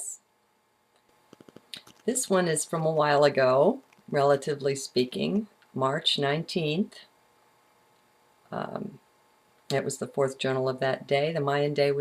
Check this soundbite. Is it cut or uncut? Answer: uncut